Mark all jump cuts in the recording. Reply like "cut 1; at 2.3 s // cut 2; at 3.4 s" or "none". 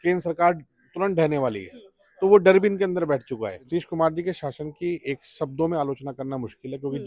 cut 1; at 3.6 s